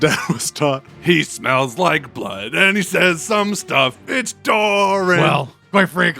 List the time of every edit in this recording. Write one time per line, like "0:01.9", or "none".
0:00.9
0:05.2